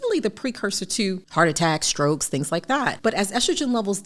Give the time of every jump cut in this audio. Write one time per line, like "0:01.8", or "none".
0:01.2
0:02.9

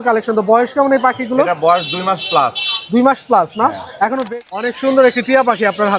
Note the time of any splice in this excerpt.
0:04.2

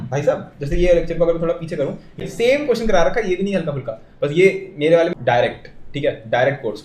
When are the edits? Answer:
0:02.3
0:05.1

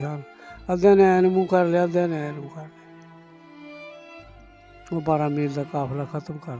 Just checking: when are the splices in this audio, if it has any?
0:02.7
0:04.3

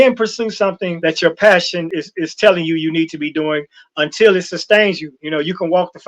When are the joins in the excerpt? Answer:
0:00.9
0:01.9

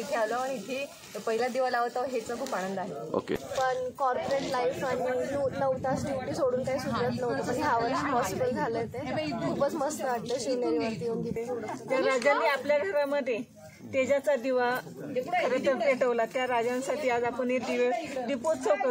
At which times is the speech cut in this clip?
0:03.4
0:11.4

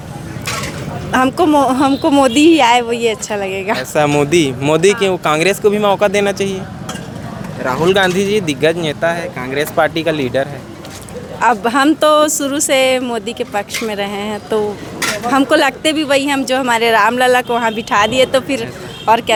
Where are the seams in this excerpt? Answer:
none

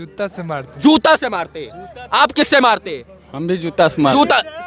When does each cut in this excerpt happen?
none

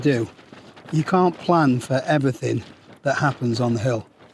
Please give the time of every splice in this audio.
none

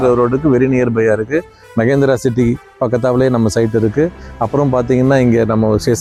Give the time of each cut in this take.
none

